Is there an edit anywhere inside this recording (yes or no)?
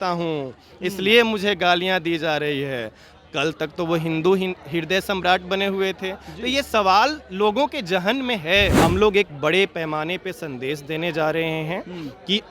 yes